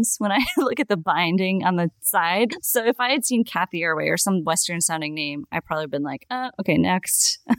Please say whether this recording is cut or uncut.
cut